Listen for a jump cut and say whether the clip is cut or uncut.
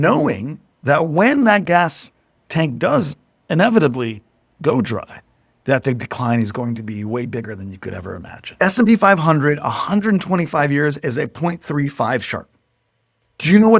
cut